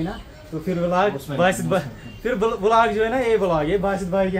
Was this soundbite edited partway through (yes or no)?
no